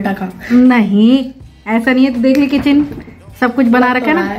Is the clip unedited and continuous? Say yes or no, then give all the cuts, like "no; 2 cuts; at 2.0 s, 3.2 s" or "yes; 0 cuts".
yes; 0 cuts